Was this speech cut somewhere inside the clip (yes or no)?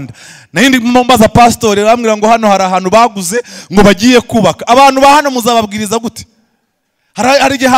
no